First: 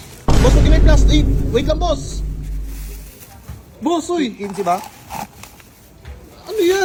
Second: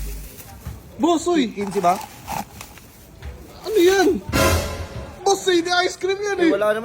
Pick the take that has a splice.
second; 1 cut; at 5.2 s

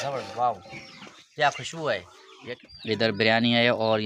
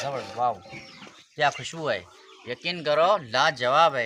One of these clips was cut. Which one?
first; 1 cut; at 2.6 s

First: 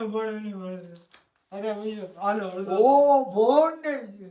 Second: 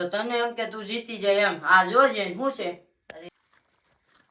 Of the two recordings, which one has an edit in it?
second; 1 cut; at 3.3 s

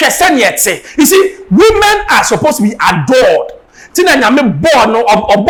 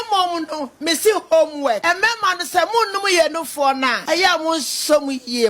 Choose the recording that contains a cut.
second; 2 cuts; at 1.8 s, 4.0 s

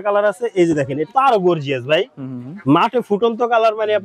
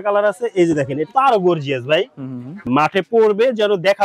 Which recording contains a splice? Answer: second; 1 cut; at 2.6 s

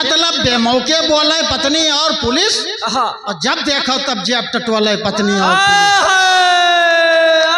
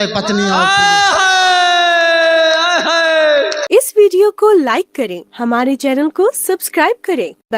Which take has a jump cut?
second; 1 cut; at 3.6 s

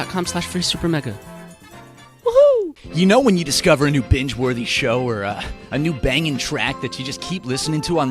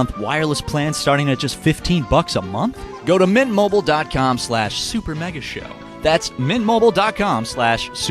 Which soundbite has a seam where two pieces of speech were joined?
first; 1 cut; at 2.7 s

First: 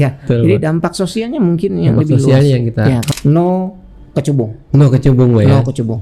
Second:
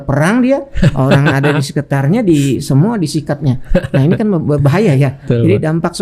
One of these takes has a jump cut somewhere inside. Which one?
first; 1 cut; at 3.1 s

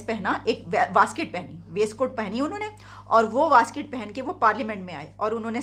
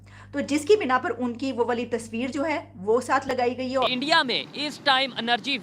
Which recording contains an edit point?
second; 1 cut; at 3.9 s

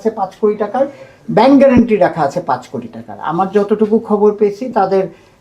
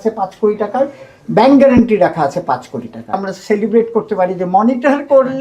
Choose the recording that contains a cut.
second; 1 cut; at 3.2 s

